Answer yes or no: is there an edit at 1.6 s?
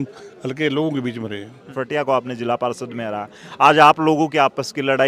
yes